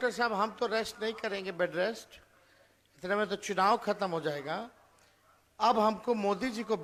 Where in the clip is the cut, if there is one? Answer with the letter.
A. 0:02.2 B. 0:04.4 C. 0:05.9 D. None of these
D